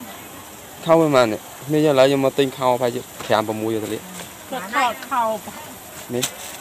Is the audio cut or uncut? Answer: uncut